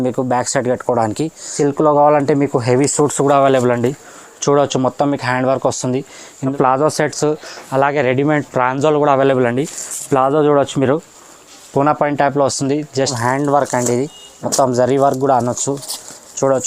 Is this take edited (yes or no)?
yes